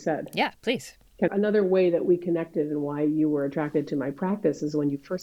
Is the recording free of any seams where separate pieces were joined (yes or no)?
no